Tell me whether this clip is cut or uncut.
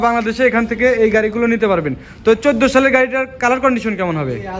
uncut